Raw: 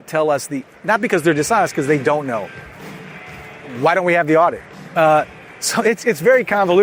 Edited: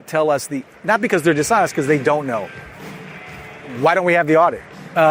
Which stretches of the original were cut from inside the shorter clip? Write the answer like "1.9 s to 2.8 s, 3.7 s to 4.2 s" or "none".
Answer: none

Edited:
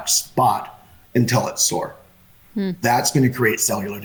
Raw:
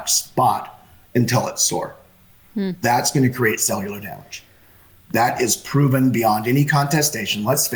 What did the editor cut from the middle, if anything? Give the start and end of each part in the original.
none

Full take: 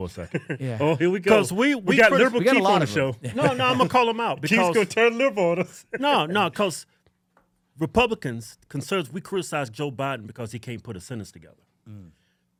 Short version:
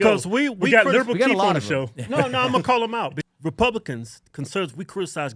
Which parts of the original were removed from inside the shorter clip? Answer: 4.4 s to 7.5 s

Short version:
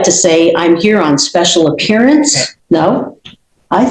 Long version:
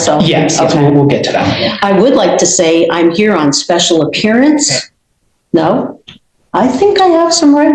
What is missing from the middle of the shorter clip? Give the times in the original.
4.8 s to 5.3 s

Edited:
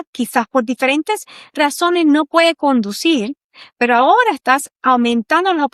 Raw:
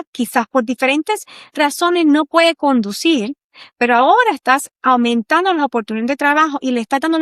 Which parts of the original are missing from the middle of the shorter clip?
none

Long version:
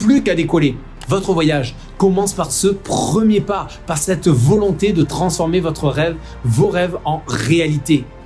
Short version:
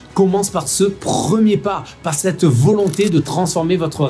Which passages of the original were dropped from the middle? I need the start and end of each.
none

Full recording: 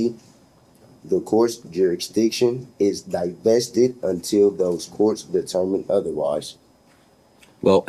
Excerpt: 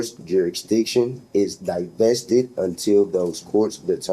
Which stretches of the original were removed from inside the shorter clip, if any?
none

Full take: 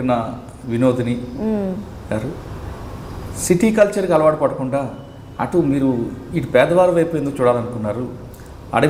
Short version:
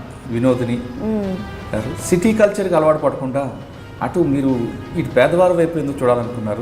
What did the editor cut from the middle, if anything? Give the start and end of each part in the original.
2.3 s to 3.3 s

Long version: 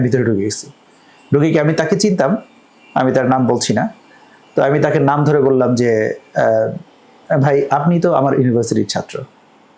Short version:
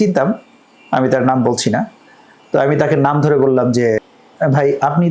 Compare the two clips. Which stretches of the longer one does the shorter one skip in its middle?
6.2 s to 7.0 s

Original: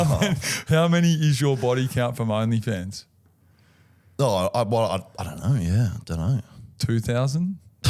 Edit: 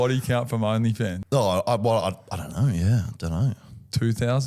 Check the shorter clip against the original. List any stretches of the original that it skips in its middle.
2.9 s to 4.1 s

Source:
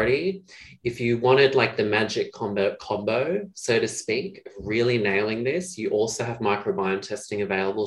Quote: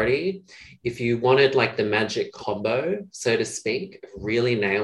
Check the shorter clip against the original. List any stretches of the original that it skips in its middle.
2.4 s to 2.8 s

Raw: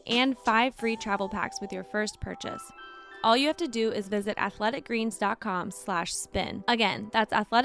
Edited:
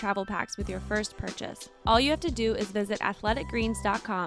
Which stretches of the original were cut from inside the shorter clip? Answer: 2.7 s to 3.0 s

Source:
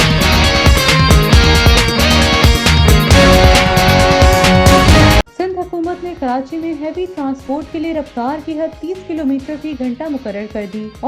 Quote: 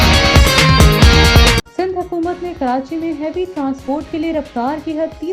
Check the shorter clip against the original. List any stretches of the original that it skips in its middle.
1.9 s to 5.2 s

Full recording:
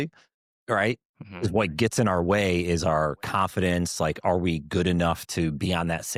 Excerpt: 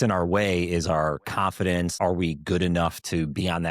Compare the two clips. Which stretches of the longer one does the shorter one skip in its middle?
3.9 s to 4.2 s

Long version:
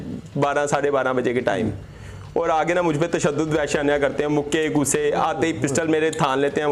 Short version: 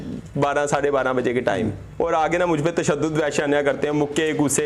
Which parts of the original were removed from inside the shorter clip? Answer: 1.8 s to 2.2 s

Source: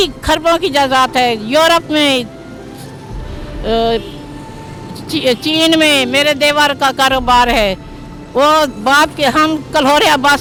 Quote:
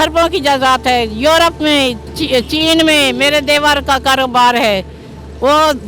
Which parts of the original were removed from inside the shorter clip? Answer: 2.4 s to 5.0 s

